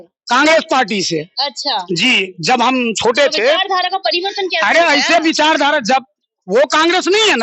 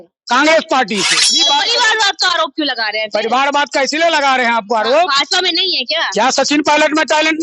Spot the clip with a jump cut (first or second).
second